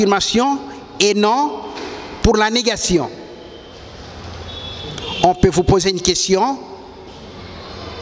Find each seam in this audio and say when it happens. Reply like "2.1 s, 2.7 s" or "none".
none